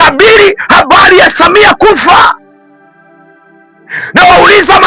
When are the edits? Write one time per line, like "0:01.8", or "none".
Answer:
0:02.4
0:03.9